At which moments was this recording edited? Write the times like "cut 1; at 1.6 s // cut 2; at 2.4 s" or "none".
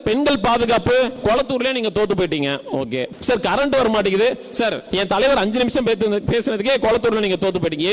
cut 1; at 1.1 s // cut 2; at 3.1 s // cut 3; at 4.8 s